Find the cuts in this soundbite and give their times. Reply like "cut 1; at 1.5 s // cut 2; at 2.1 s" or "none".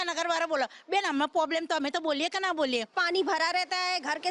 cut 1; at 3.0 s